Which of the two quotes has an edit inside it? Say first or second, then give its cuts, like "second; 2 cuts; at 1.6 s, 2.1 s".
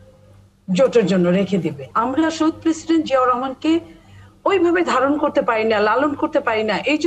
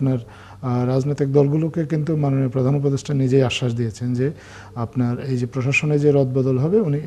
first; 1 cut; at 1.8 s